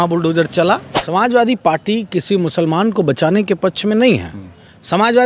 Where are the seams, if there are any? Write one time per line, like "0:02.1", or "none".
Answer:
0:00.9